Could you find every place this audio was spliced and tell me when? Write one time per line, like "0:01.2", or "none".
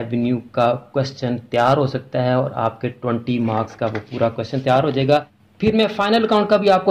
0:05.2